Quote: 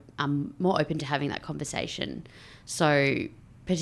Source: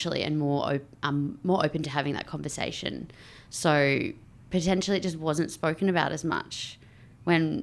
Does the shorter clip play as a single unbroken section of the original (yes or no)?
yes